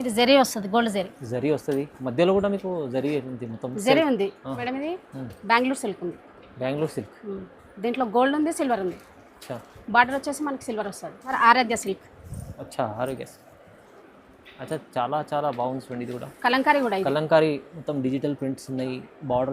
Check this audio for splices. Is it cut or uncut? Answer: cut